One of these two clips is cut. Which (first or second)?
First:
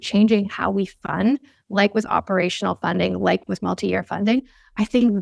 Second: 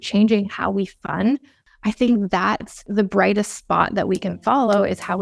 second